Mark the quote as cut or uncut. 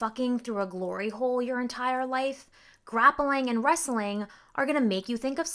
uncut